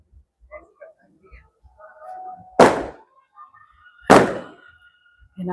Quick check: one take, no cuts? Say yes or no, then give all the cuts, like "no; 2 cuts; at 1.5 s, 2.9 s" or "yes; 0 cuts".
yes; 0 cuts